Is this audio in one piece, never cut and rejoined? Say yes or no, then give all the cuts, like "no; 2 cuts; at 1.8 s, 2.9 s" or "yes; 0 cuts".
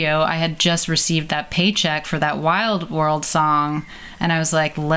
yes; 0 cuts